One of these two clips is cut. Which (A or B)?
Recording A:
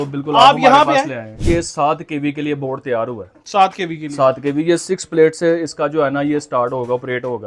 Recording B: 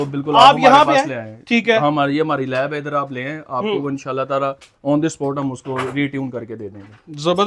A